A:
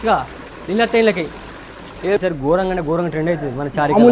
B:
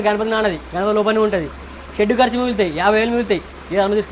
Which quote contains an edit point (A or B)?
A